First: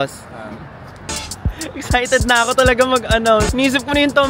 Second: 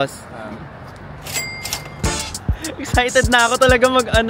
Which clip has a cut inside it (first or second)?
first